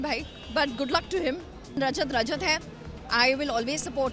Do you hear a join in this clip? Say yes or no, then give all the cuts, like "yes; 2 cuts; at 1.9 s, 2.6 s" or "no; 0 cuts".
yes; 1 cut; at 1.8 s